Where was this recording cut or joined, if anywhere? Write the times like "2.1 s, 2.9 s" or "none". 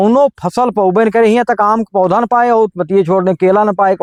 none